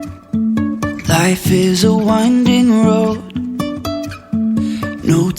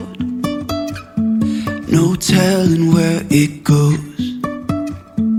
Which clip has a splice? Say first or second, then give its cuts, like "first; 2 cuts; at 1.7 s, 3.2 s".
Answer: first; 1 cut; at 0.9 s